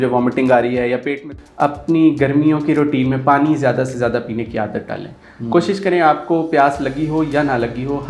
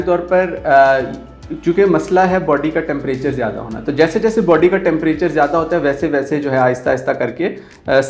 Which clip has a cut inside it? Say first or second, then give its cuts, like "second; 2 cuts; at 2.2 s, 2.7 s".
first; 1 cut; at 1.2 s